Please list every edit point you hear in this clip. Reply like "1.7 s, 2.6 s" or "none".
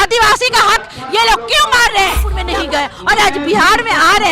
2.3 s